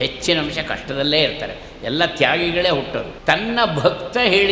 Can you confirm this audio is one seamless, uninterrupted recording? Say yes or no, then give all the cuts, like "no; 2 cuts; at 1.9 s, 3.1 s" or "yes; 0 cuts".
no; 1 cut; at 3.1 s